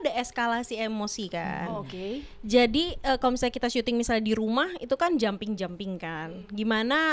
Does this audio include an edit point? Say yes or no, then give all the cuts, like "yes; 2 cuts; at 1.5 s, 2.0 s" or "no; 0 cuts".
no; 0 cuts